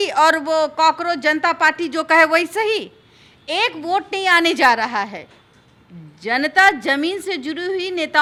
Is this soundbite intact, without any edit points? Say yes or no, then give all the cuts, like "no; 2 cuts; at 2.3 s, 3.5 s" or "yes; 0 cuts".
yes; 0 cuts